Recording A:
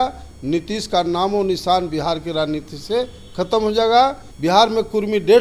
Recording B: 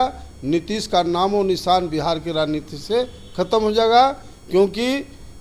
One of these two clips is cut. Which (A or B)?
A